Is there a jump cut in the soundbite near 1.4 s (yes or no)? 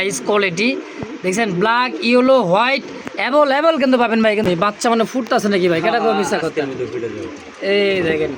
no